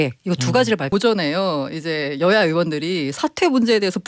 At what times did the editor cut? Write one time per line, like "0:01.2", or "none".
0:00.9